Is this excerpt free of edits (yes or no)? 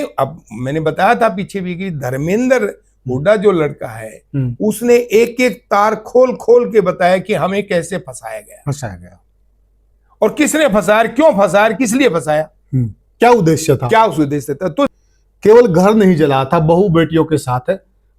no